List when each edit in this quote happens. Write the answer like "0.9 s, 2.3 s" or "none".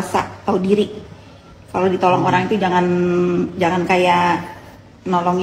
none